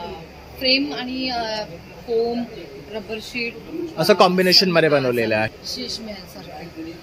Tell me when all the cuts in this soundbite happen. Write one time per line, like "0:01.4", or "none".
0:05.5